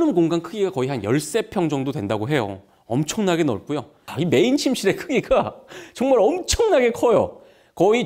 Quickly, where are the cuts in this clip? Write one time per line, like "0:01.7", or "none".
0:04.0